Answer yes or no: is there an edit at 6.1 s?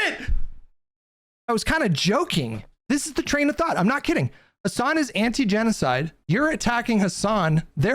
yes